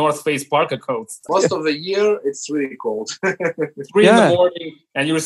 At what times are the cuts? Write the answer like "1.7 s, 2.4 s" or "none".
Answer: 1.1 s